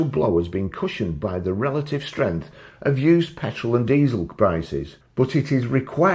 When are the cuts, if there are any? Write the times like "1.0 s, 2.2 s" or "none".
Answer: 5.0 s